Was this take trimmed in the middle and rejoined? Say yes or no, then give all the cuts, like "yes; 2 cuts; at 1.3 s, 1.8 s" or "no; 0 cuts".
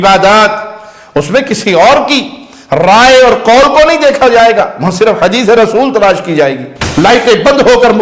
yes; 1 cut; at 6.7 s